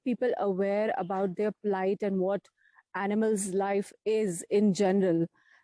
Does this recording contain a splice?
no; 0 cuts

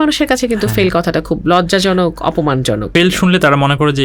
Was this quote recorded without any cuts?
no; 1 cut; at 2.9 s

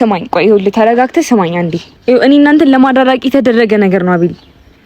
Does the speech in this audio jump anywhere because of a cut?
yes; 1 cut; at 1.9 s

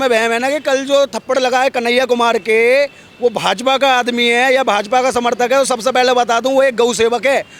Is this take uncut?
yes; 0 cuts

